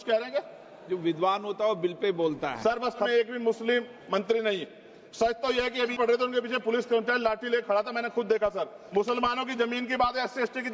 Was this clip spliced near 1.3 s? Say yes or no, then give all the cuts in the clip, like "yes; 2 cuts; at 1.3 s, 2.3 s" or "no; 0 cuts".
no; 3 cuts; at 3.1 s, 5.9 s, 8.8 s